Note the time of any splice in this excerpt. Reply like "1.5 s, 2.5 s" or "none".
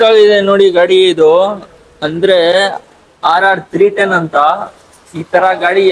none